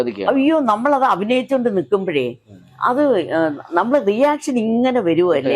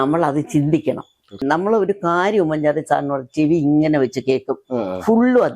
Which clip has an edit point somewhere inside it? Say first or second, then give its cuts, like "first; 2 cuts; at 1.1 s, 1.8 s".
second; 1 cut; at 1.4 s